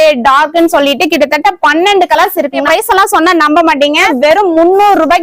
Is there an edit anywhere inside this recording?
yes; 2 cuts; at 2.6 s, 4.1 s

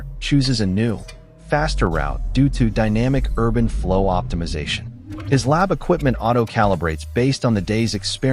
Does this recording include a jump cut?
no; 0 cuts

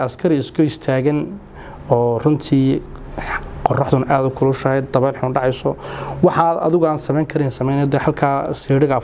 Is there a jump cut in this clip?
no; 0 cuts

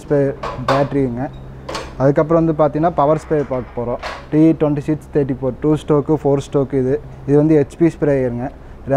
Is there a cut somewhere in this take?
no; 0 cuts

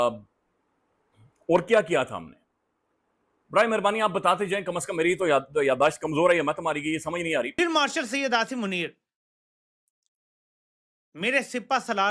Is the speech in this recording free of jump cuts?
no; 1 cut; at 7.6 s

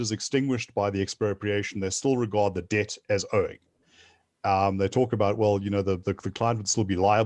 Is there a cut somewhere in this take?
no; 0 cuts

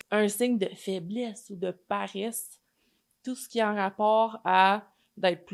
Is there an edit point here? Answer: no; 0 cuts

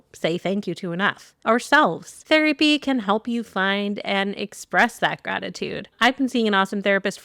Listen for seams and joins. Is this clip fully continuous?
no; 2 cuts; at 2.1 s, 5.8 s

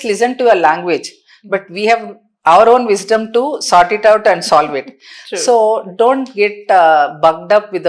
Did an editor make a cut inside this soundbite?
no; 0 cuts

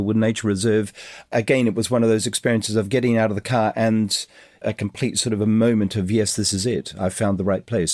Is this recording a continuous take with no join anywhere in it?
no; 2 cuts; at 1.3 s, 4.6 s

